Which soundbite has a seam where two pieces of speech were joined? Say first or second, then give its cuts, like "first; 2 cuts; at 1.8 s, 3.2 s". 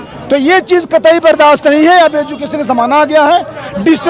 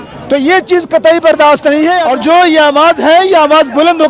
second; 1 cut; at 2.1 s